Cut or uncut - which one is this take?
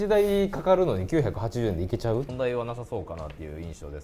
cut